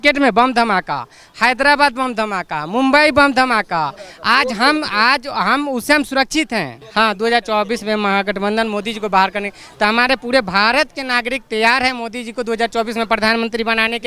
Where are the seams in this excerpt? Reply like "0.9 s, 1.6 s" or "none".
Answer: 6.8 s

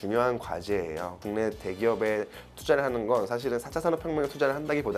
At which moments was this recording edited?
1.2 s

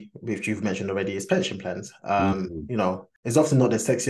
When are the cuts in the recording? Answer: 3.1 s

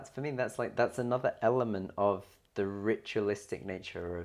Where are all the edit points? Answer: none

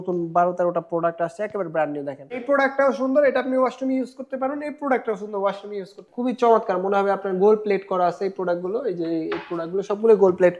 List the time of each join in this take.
2.4 s, 6.1 s

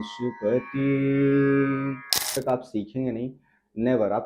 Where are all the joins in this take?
2.3 s

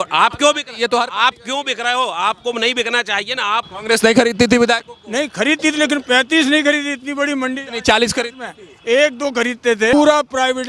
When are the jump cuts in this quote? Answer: 3.7 s, 9.9 s

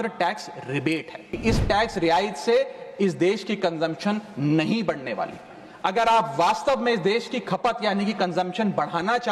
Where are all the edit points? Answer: 1.3 s

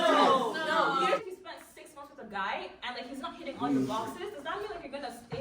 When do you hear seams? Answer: 1.2 s

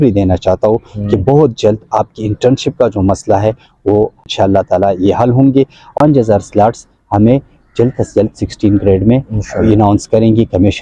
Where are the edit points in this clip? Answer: 4.3 s, 5.9 s

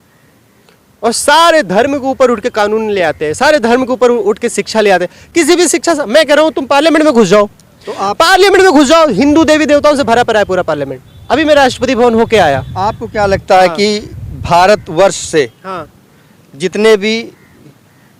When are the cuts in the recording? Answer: none

